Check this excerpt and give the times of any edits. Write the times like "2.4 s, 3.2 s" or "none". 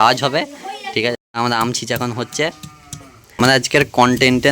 1.2 s, 3.4 s